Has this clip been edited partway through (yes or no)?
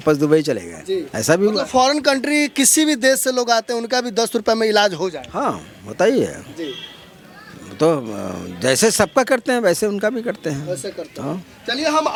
no